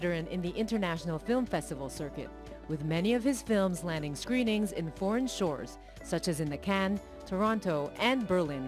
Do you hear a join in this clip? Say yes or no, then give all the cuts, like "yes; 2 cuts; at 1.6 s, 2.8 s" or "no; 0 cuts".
yes; 1 cut; at 1.5 s